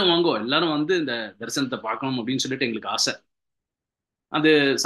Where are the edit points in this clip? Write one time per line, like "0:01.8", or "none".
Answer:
none